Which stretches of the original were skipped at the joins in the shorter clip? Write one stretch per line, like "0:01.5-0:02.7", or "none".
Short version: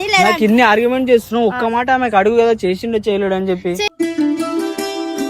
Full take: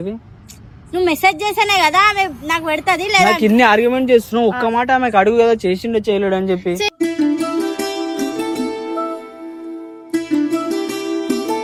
none